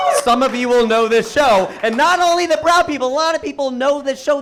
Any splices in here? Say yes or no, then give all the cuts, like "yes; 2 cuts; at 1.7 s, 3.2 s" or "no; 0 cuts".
no; 0 cuts